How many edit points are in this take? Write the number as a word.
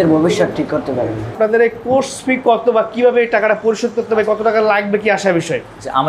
zero